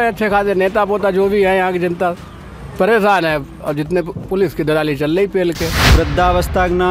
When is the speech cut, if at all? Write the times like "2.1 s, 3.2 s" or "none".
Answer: 5.8 s